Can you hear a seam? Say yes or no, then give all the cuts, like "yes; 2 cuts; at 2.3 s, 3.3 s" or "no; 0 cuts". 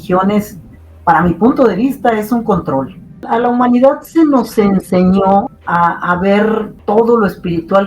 yes; 3 cuts; at 3.3 s, 5.6 s, 6.7 s